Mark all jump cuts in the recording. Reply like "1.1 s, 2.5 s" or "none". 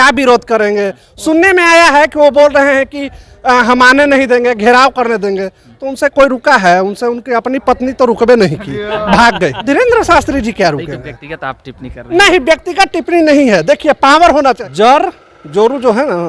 9.6 s, 14.6 s